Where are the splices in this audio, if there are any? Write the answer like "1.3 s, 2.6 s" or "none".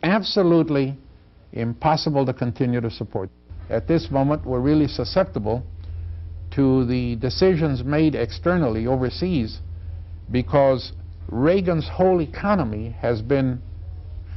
3.3 s